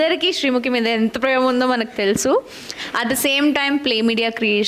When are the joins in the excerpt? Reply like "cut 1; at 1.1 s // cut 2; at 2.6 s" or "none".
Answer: none